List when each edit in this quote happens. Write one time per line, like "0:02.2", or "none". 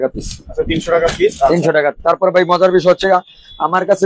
none